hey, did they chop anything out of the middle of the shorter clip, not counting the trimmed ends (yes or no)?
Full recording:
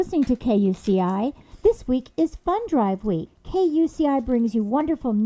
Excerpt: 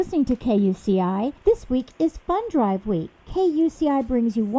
yes